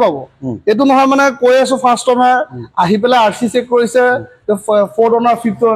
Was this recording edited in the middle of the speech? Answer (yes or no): no